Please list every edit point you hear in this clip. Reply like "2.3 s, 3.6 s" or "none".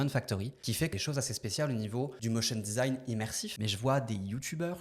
0.9 s, 2.2 s, 3.5 s